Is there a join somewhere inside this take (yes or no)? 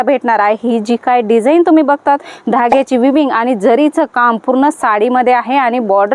no